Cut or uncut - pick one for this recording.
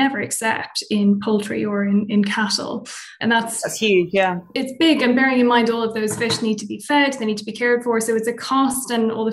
cut